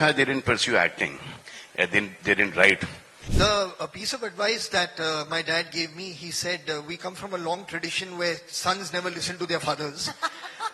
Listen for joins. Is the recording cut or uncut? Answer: cut